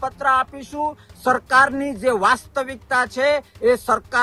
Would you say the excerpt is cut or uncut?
uncut